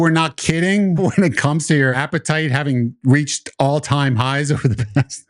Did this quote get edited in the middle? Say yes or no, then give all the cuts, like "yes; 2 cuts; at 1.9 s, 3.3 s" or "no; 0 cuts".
yes; 2 cuts; at 1.0 s, 2.0 s